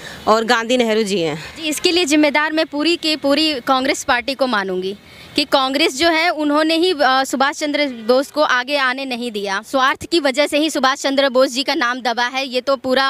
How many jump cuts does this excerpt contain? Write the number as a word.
two